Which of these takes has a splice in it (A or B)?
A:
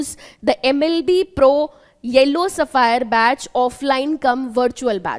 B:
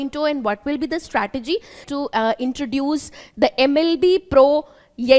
B